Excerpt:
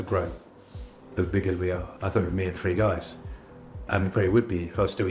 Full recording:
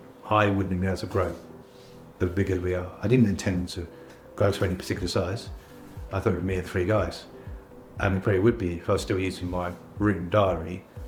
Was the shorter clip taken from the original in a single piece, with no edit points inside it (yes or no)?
no